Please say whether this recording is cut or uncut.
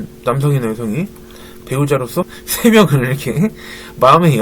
cut